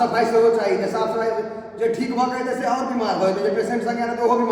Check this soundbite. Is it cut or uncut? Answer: uncut